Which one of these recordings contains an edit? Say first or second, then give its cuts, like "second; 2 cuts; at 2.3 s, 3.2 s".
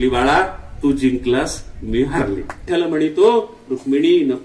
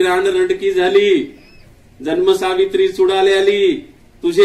first; 1 cut; at 2.6 s